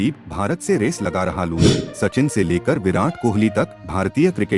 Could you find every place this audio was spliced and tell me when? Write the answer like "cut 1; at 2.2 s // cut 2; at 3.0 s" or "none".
cut 1; at 1.8 s